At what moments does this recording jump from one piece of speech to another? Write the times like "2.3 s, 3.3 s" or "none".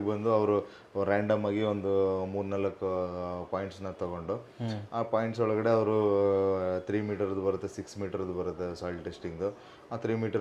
none

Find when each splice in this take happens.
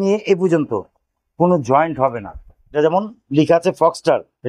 2.8 s

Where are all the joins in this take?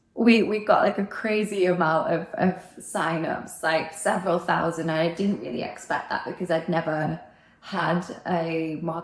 none

